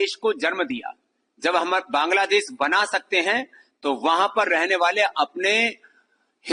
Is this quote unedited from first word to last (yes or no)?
yes